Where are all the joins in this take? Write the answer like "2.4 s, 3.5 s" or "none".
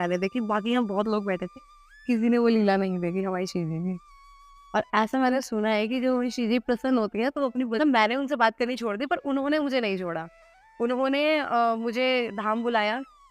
7.7 s

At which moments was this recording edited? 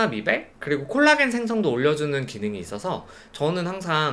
none

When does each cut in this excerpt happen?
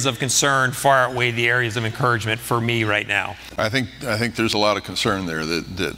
3.4 s

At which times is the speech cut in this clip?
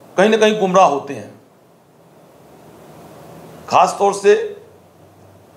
none

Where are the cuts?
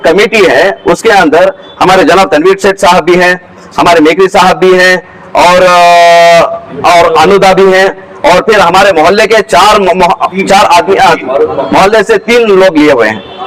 none

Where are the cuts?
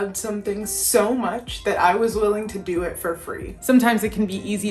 3.5 s

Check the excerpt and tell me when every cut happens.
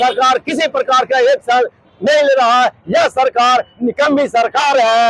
none

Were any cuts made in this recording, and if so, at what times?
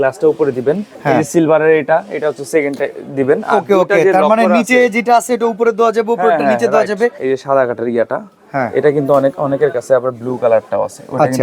0.9 s, 7.2 s

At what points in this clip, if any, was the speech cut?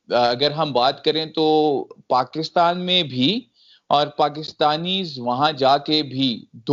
none

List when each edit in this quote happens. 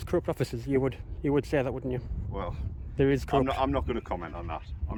none

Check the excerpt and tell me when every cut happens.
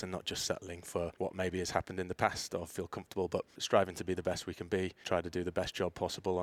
1.1 s, 3.6 s, 5.0 s

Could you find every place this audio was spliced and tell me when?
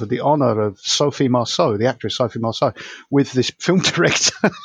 none

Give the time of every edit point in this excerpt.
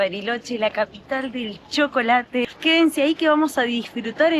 2.4 s

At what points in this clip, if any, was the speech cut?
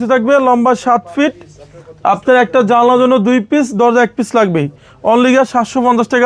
none

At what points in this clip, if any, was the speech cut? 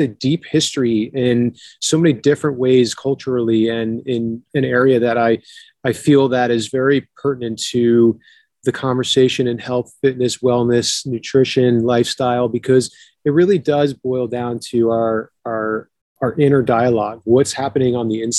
4.4 s

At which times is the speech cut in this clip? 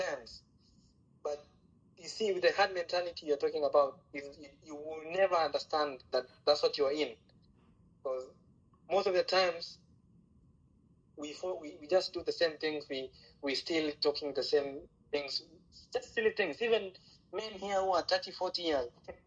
none

